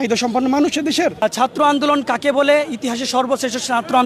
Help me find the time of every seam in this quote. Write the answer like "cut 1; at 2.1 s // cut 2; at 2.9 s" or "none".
cut 1; at 1.2 s